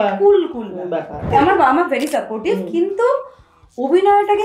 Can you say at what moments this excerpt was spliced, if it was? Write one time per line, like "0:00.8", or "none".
0:01.3